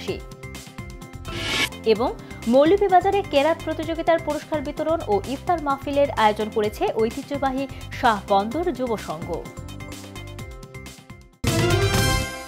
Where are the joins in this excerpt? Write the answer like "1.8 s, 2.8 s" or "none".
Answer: 11.4 s